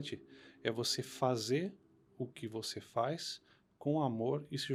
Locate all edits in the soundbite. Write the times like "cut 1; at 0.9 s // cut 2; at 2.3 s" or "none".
none

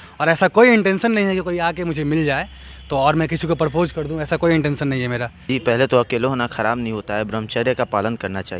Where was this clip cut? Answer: cut 1; at 5.4 s

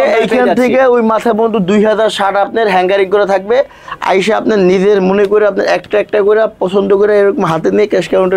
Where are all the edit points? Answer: none

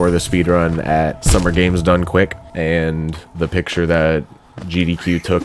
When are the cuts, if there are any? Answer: cut 1; at 1.2 s // cut 2; at 2.4 s

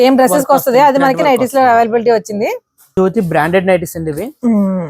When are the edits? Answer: cut 1; at 2.9 s

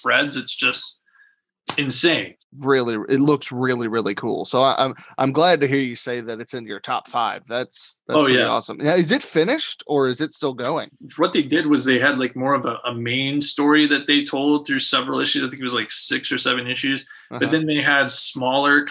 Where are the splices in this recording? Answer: cut 1; at 2.4 s // cut 2; at 10.9 s

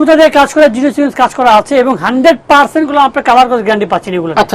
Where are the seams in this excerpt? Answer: none

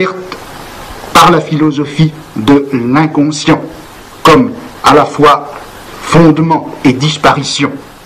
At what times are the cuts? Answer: cut 1; at 3.1 s

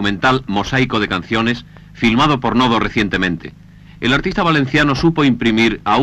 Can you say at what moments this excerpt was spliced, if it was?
none

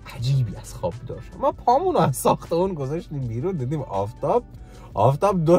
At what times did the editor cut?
cut 1; at 1.2 s

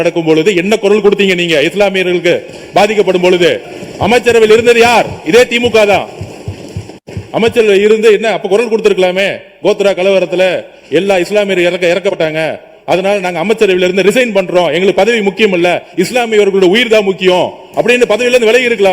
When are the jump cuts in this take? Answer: none

